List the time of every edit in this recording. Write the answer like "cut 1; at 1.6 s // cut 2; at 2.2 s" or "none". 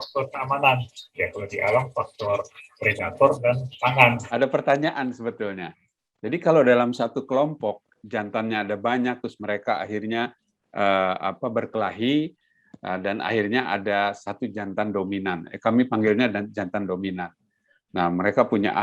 cut 1; at 4.2 s